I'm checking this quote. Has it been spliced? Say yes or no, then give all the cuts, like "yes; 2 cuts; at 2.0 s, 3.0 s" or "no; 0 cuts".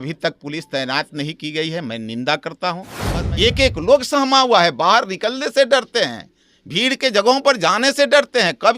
yes; 1 cut; at 2.9 s